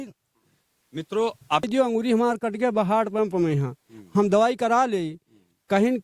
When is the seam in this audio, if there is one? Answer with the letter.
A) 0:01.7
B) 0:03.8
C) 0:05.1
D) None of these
A